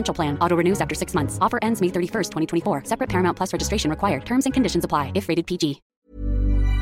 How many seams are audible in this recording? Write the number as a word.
one